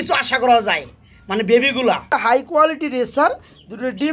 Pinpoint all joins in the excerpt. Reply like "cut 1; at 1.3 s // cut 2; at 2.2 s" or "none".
cut 1; at 2.5 s